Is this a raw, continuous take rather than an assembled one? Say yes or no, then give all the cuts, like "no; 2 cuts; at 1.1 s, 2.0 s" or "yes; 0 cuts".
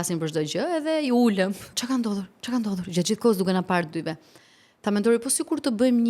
no; 1 cut; at 1.7 s